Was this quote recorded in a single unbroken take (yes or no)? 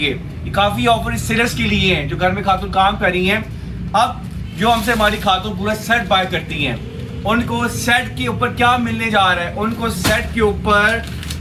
yes